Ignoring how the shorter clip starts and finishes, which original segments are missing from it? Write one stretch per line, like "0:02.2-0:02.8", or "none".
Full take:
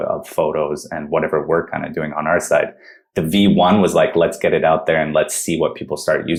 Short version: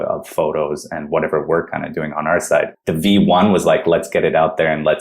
0:02.8-0:03.1